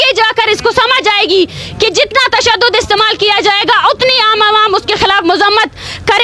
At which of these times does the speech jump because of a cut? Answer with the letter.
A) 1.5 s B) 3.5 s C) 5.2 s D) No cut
D